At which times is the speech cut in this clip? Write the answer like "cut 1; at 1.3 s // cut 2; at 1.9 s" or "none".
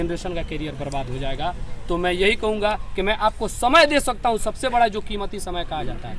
none